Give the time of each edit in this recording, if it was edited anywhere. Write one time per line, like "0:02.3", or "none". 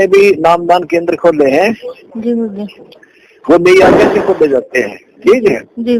none